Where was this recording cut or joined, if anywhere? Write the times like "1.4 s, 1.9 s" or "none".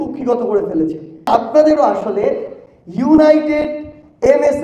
1.3 s